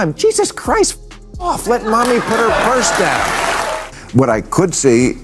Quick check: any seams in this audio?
yes; 1 cut; at 3.9 s

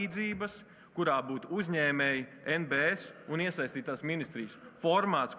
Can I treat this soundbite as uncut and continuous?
yes; 0 cuts

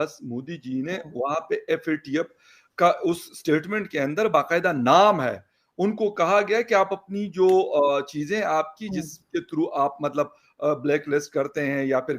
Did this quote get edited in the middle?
no; 0 cuts

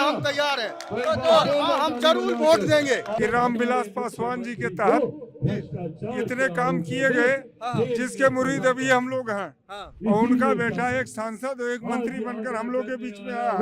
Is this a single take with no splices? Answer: no; 1 cut; at 3.1 s

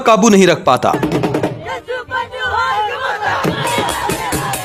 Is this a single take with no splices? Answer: yes; 0 cuts

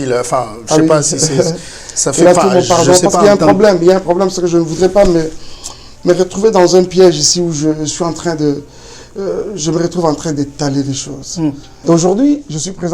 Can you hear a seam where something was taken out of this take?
yes; 1 cut; at 11.7 s

